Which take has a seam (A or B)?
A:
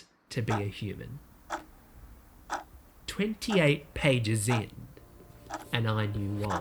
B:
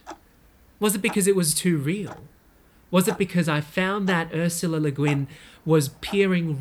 A